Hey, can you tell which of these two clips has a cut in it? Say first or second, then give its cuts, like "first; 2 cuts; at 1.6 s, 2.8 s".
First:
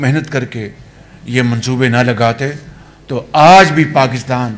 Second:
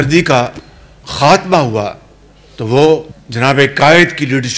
second; 1 cut; at 3.2 s